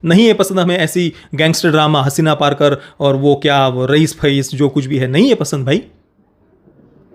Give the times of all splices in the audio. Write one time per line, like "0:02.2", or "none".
none